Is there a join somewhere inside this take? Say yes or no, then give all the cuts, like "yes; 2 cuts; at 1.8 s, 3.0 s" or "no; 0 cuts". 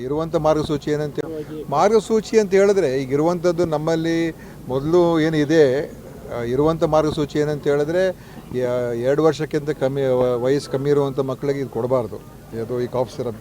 yes; 1 cut; at 1.1 s